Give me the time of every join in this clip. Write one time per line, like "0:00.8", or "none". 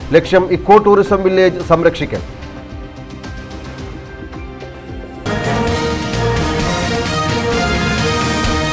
0:05.2